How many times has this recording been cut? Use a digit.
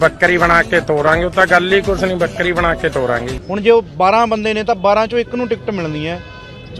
1